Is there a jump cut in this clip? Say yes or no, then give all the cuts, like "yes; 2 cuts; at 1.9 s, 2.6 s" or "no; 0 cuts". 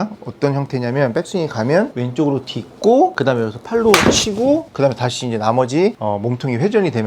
yes; 4 cuts; at 2.0 s, 3.2 s, 4.7 s, 6.0 s